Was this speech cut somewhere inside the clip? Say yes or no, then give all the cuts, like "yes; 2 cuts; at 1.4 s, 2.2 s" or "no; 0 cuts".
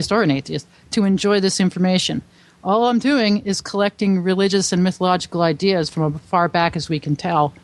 no; 0 cuts